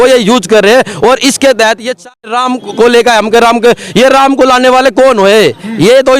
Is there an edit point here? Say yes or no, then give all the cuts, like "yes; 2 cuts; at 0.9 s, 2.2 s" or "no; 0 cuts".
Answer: yes; 1 cut; at 2.3 s